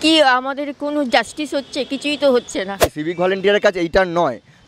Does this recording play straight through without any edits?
no; 1 cut; at 2.9 s

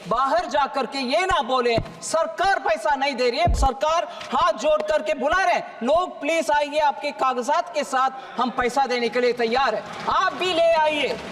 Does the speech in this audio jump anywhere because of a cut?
yes; 1 cut; at 3.6 s

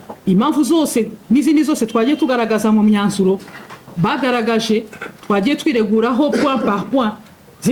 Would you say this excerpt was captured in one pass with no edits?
yes; 0 cuts

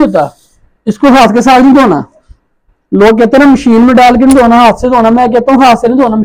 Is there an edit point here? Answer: no; 0 cuts

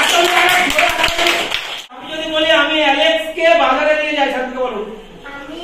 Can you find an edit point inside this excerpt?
yes; 1 cut; at 2.0 s

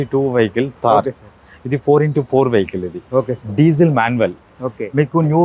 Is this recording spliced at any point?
no; 0 cuts

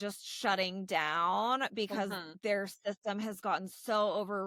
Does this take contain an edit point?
no; 0 cuts

